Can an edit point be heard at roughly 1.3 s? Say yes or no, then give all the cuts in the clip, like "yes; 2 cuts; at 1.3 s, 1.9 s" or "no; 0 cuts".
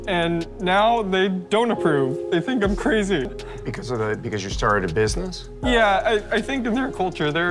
no; 0 cuts